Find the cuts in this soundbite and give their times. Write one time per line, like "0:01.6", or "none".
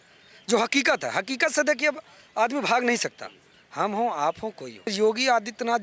0:04.9